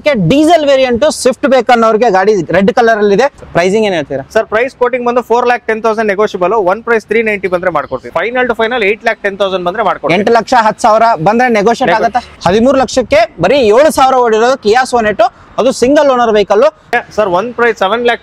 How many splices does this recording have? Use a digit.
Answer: 4